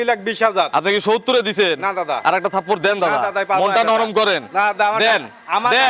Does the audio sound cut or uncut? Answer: uncut